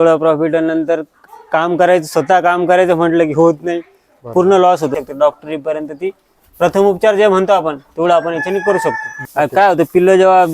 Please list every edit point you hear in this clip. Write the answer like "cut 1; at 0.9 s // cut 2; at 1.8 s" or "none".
cut 1; at 4.9 s // cut 2; at 9.1 s